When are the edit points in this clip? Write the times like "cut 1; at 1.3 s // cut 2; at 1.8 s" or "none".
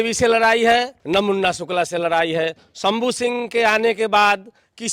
cut 1; at 1.0 s